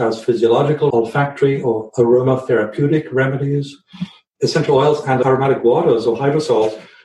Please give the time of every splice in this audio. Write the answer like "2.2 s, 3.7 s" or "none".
0.9 s, 4.4 s